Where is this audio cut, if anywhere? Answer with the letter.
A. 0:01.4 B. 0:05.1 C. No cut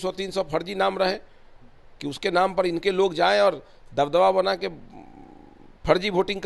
C